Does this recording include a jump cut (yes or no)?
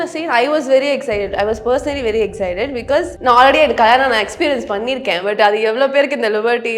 yes